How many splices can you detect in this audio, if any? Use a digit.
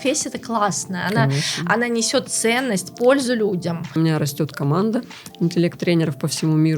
1